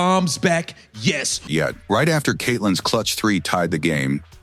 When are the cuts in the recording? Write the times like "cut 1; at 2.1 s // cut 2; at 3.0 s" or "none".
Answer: none

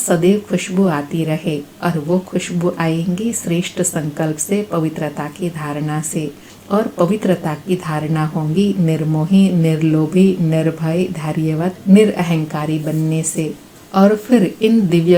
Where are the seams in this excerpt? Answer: none

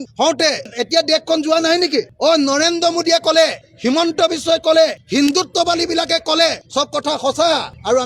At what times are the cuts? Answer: none

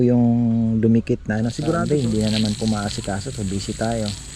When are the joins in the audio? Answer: cut 1; at 1.7 s

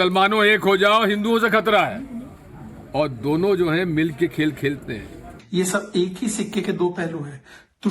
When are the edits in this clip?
cut 1; at 5.4 s

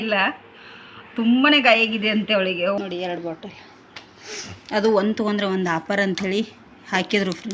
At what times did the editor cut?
cut 1; at 2.8 s

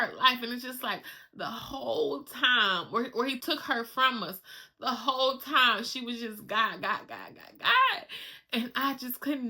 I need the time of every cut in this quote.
cut 1; at 3.4 s

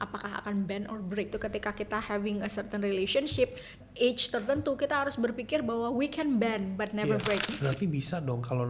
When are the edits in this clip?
cut 1; at 1.3 s // cut 2; at 3.8 s // cut 3; at 7.5 s

